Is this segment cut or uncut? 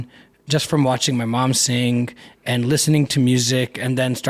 uncut